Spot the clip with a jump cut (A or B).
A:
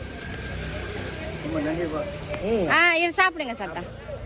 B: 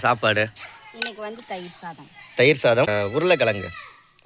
B